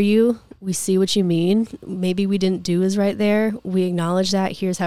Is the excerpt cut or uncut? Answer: uncut